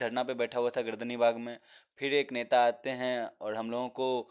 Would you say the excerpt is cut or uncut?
uncut